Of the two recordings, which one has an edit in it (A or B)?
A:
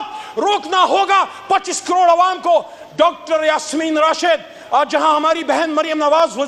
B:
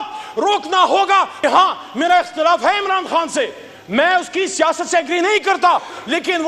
B